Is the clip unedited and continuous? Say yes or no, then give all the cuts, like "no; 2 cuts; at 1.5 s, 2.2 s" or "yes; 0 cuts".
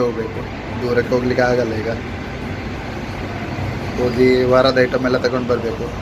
yes; 0 cuts